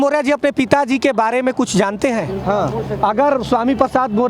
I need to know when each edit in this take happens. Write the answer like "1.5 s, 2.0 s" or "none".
none